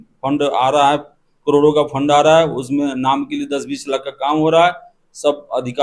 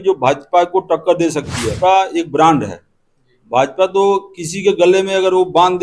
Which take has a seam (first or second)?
second